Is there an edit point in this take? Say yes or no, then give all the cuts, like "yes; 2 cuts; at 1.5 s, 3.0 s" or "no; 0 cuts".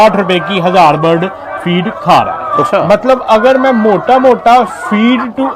yes; 1 cut; at 2.7 s